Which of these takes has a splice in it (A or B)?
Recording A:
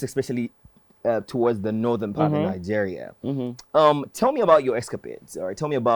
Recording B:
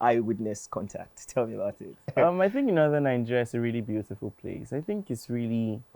B